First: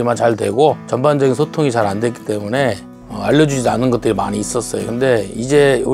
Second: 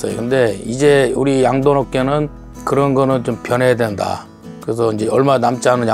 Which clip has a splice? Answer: first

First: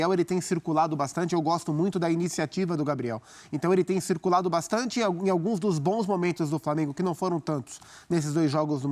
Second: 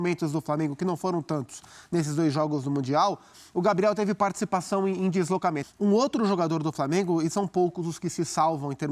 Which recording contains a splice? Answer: second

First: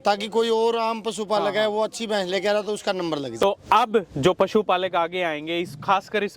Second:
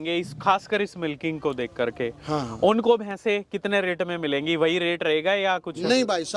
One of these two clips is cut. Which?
first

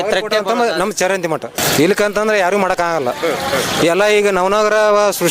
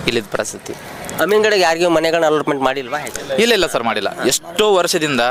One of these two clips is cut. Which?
first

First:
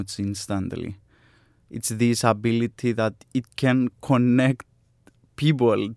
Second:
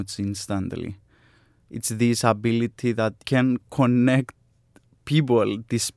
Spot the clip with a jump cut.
second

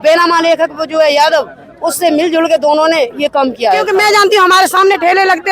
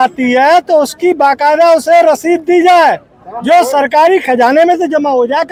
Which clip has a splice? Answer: first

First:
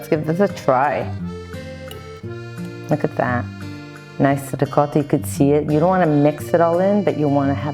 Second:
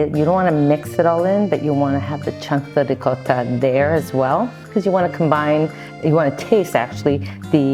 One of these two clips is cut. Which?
first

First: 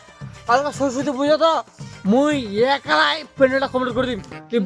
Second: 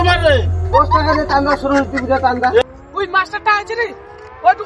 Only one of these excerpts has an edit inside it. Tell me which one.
second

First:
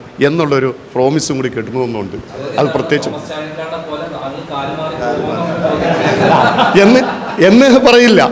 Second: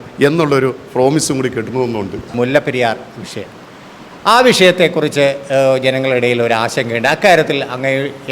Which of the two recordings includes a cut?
second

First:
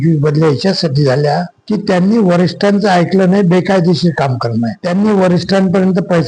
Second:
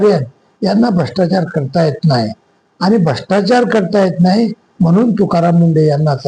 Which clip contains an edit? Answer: first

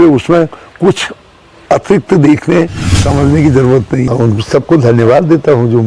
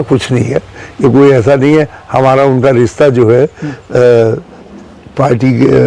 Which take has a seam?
first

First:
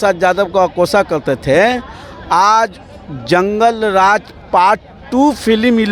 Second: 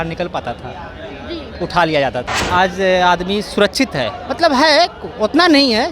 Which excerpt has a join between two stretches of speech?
second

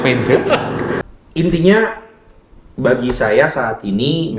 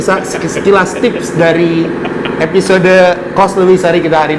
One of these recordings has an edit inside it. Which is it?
first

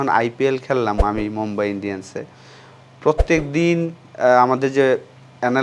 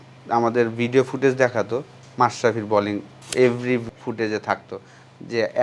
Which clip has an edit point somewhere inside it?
second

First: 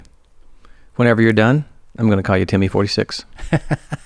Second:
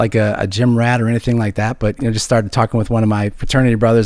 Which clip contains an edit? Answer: second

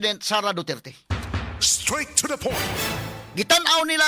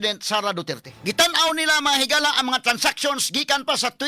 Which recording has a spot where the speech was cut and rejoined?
second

